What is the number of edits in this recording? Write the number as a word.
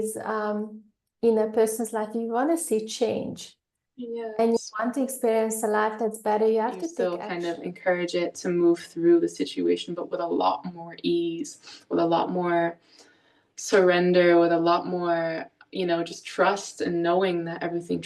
one